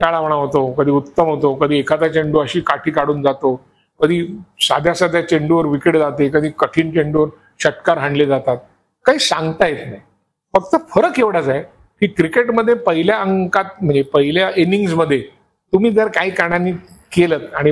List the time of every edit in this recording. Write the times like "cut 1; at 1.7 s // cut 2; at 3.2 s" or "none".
none